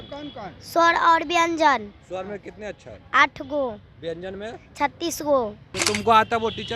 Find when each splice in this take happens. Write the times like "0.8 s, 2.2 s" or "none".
5.7 s